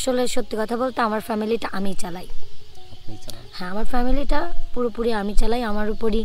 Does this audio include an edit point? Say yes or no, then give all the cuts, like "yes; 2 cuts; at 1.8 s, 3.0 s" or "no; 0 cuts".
no; 0 cuts